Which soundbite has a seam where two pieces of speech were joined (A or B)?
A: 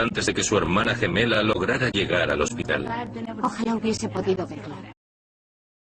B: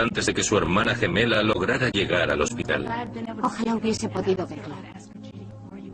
B